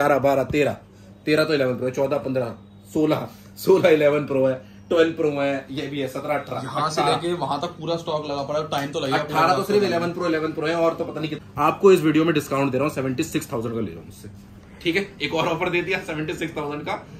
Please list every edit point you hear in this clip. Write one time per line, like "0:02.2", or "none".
0:11.4